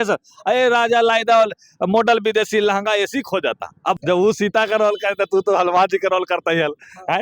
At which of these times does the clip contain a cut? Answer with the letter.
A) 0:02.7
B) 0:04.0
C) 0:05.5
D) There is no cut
B